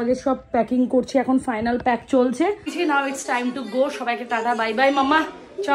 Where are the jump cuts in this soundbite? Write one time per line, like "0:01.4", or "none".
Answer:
0:02.7